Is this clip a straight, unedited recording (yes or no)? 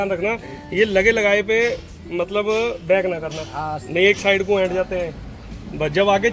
yes